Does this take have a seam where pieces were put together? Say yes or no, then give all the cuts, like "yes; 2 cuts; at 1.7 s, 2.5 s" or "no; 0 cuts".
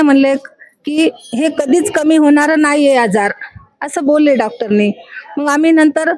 no; 0 cuts